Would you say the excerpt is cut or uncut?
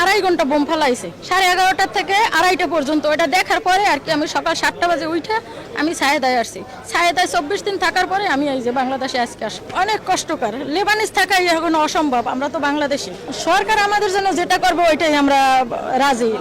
uncut